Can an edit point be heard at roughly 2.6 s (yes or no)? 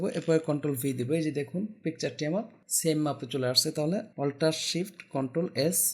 yes